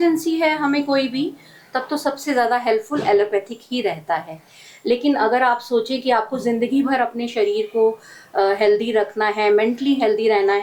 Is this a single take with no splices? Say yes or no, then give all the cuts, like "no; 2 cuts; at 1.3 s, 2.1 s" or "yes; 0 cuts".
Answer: yes; 0 cuts